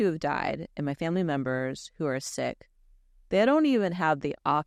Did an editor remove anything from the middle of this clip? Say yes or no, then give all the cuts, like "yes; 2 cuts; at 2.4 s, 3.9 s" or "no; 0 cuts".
no; 0 cuts